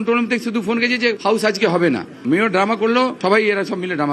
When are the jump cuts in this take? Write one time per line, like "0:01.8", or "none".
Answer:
0:01.2
0:03.2